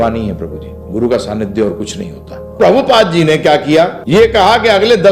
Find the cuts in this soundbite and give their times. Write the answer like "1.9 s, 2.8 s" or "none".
2.5 s, 4.0 s